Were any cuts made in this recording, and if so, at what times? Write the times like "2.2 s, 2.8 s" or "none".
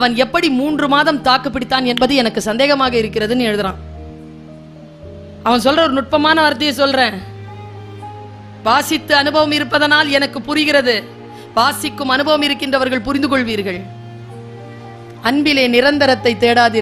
none